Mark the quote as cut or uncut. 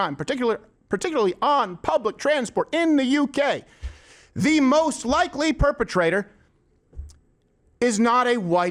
uncut